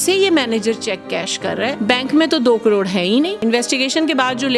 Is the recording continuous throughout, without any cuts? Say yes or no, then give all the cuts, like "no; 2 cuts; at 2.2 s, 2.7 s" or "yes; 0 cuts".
no; 2 cuts; at 1.8 s, 3.4 s